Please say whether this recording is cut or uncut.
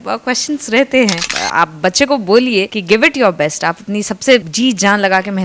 cut